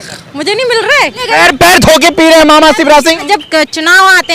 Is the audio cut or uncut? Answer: cut